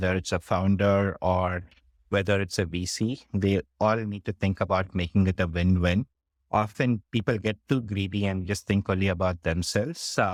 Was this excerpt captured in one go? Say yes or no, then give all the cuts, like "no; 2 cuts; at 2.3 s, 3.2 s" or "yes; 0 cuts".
yes; 0 cuts